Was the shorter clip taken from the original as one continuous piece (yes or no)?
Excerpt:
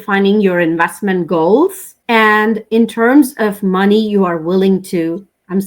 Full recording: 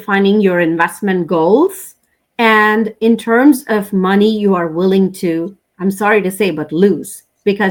no